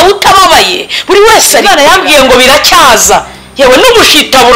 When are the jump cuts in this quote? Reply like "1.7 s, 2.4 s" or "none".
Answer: 1.6 s